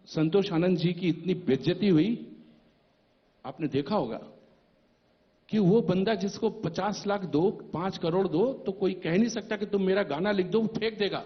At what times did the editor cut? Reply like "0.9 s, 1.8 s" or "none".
none